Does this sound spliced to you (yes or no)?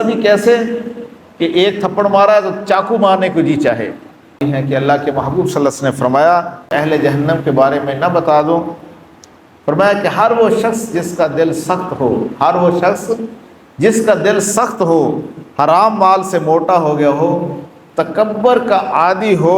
yes